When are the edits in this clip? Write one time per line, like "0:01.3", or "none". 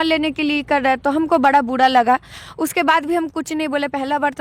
none